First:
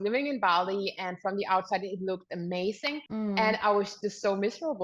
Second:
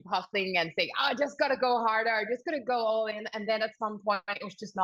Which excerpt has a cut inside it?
first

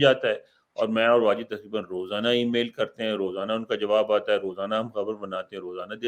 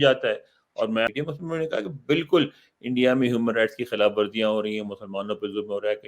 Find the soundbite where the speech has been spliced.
second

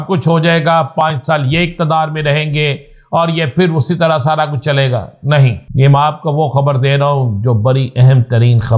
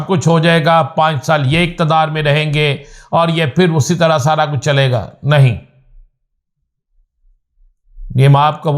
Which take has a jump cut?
first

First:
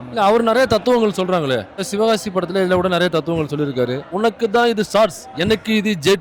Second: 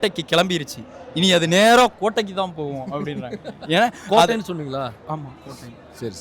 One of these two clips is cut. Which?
first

